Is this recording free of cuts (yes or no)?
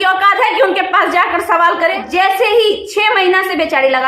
no